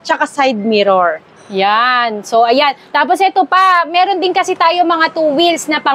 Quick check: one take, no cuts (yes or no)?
yes